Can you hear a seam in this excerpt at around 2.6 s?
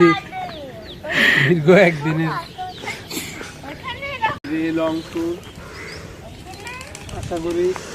no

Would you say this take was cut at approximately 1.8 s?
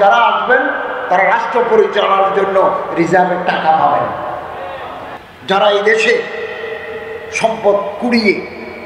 no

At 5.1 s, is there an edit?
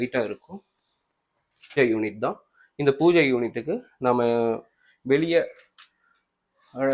no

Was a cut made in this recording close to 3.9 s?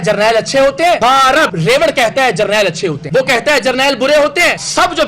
no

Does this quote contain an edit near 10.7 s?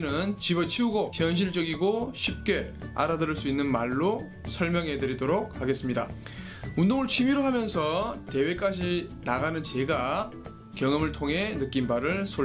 no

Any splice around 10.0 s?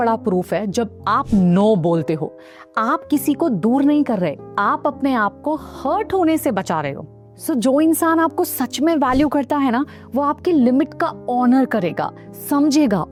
no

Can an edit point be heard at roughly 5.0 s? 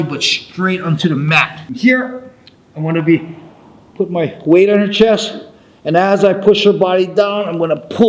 no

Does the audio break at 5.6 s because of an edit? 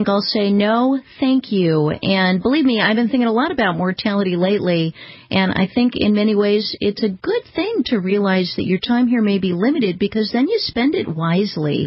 no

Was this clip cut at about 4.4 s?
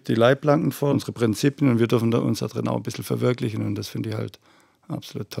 no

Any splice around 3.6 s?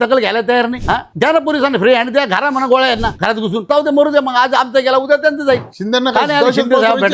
yes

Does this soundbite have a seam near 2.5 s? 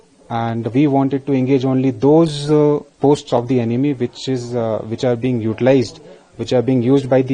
no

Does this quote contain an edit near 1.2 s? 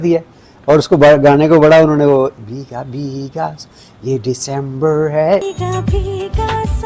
no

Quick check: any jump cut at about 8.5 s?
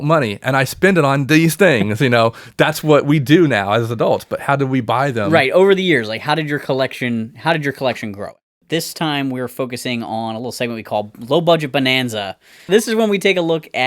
yes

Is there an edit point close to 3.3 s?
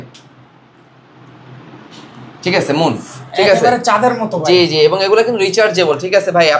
no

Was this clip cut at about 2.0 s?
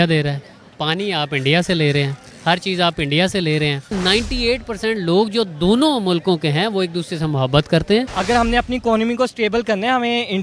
no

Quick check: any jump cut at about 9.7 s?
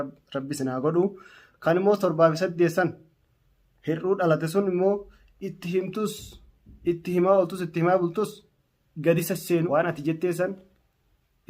yes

